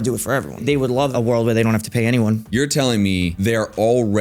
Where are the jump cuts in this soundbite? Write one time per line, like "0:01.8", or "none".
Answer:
0:01.0
0:02.4
0:03.3